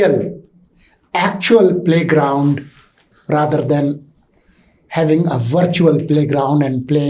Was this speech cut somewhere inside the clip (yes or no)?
no